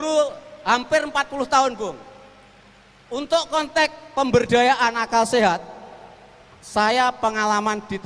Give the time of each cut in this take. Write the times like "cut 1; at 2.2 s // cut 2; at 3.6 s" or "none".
none